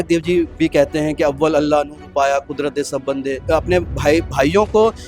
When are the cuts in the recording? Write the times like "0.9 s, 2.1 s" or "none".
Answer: 3.4 s